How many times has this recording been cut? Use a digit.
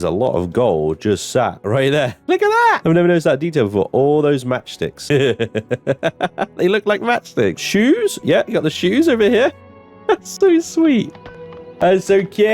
3